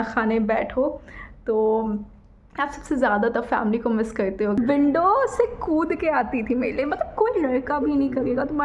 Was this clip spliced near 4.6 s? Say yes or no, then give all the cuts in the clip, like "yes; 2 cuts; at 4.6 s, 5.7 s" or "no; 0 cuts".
yes; 1 cut; at 4.6 s